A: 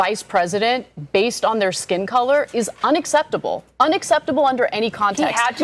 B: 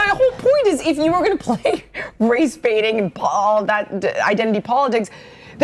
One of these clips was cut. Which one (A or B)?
A